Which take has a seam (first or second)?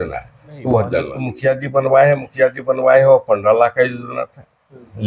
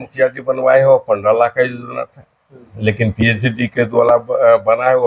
first